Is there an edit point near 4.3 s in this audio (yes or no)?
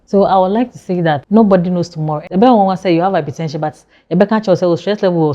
no